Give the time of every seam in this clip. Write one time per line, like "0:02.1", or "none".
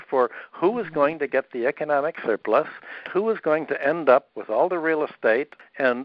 0:03.1
0:04.4